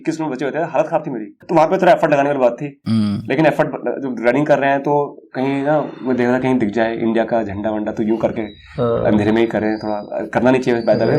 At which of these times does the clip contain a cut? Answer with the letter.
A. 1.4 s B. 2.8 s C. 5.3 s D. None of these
A